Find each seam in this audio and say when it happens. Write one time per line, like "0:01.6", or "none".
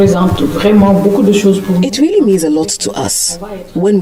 none